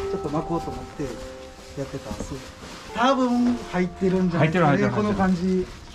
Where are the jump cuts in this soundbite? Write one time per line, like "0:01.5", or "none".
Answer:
0:02.7

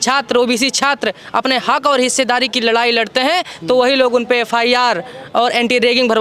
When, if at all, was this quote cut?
none

